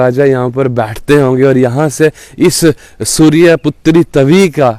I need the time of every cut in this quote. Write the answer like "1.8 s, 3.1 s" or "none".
none